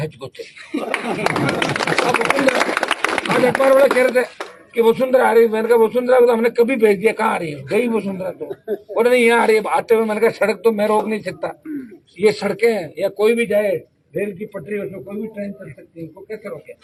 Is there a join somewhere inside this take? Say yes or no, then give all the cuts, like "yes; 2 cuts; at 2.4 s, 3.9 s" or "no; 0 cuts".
no; 0 cuts